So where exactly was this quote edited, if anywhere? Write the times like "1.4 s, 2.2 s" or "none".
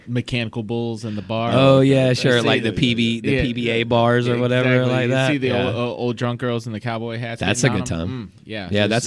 none